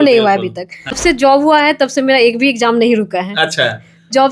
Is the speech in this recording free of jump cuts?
no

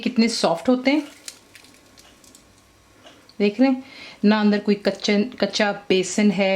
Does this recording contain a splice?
no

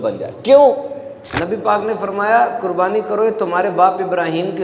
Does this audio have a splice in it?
yes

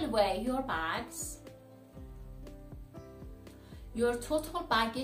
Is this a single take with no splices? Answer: no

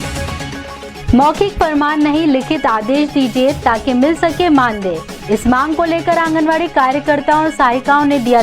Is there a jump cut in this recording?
yes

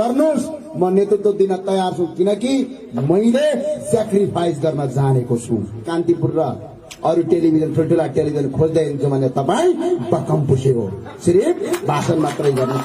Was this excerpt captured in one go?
no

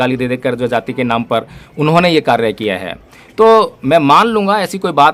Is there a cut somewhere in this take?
no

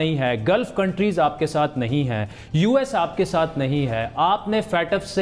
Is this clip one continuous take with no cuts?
yes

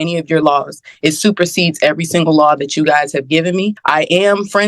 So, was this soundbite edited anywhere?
yes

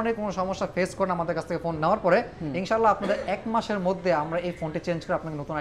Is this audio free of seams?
yes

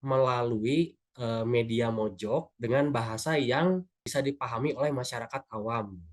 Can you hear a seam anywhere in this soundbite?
yes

